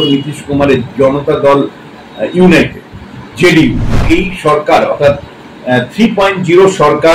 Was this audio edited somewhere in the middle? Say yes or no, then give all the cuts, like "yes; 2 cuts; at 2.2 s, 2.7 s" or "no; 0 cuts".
yes; 1 cut; at 4.0 s